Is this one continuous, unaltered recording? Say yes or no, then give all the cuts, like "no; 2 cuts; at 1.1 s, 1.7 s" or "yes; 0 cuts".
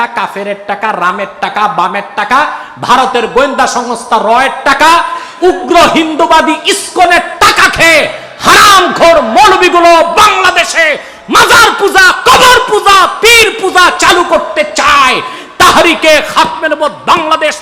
yes; 0 cuts